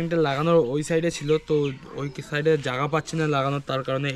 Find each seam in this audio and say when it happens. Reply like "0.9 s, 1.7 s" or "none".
none